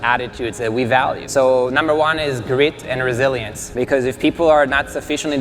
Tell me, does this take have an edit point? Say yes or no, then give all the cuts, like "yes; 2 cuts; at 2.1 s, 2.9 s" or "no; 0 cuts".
yes; 2 cuts; at 1.2 s, 3.6 s